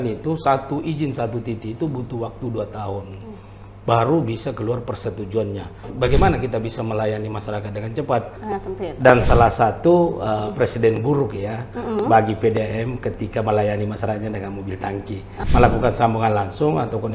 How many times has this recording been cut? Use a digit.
3